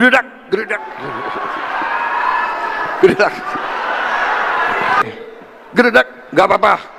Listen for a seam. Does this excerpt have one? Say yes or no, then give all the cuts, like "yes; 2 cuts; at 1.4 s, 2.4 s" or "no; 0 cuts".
no; 0 cuts